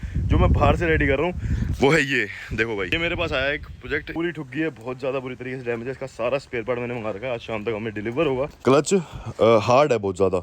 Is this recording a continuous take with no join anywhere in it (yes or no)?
no